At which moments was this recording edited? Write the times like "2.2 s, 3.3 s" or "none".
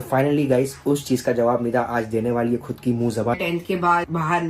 3.4 s